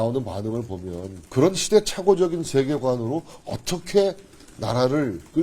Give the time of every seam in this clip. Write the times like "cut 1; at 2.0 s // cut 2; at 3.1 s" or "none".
cut 1; at 1.1 s

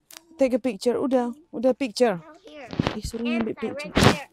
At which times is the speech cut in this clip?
none

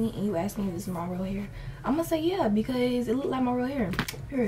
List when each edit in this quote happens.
none

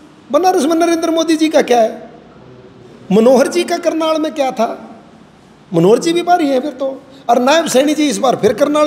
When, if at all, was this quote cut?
none

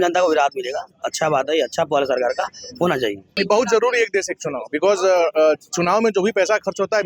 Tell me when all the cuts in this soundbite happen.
cut 1; at 3.2 s

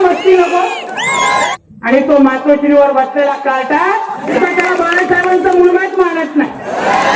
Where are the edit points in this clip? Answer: cut 1; at 1.5 s // cut 2; at 4.4 s

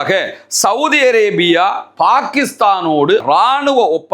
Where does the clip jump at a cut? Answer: cut 1; at 3.2 s

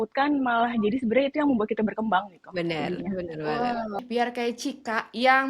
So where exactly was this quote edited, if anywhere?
cut 1; at 4.0 s

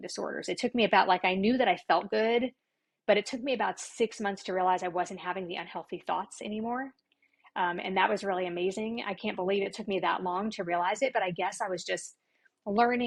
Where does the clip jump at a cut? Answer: none

